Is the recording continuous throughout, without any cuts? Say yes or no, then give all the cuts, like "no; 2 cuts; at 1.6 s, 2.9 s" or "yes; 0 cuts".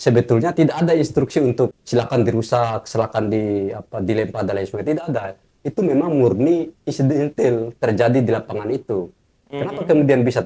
no; 1 cut; at 1.8 s